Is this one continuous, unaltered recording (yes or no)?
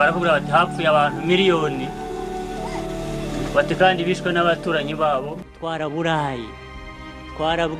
no